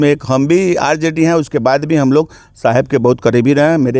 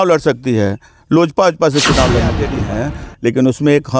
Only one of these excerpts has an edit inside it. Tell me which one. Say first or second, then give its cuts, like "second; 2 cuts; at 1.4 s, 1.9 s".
second; 1 cut; at 2.5 s